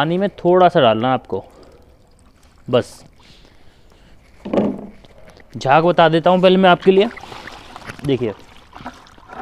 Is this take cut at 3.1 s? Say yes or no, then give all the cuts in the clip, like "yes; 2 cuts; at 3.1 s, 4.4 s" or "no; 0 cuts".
no; 0 cuts